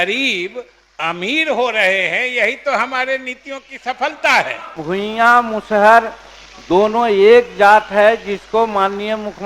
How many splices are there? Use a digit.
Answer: 1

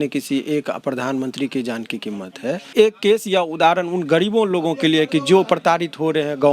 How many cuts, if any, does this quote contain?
1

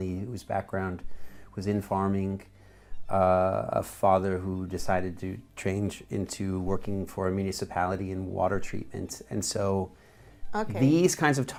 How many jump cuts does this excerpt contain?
0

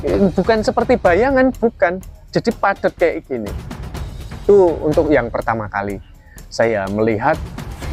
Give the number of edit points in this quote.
0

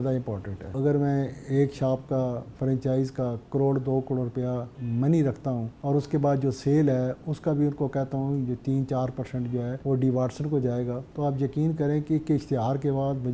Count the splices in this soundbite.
5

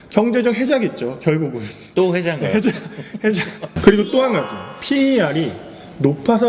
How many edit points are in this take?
0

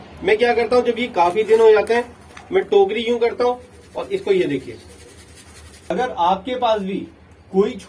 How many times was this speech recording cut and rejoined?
1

